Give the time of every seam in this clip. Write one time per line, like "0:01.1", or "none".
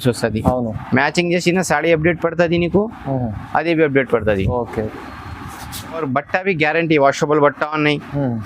0:06.0